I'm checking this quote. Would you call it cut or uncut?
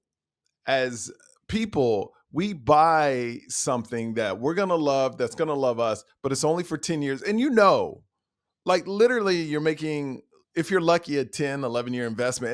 uncut